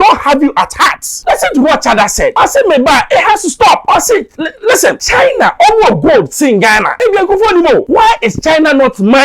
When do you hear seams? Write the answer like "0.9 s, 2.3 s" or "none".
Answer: 1.1 s, 2.3 s, 3.8 s, 5.0 s, 6.9 s, 7.9 s